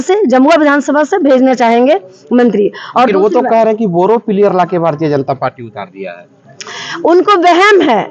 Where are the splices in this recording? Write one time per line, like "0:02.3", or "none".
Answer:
none